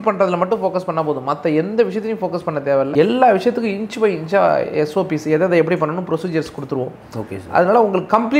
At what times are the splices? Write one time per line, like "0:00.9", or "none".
none